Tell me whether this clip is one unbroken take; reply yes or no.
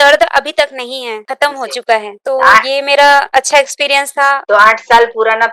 no